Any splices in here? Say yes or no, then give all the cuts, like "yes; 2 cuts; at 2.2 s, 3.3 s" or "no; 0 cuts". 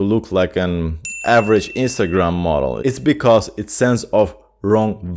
no; 0 cuts